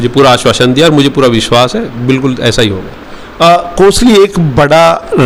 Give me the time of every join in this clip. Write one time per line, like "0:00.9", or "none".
none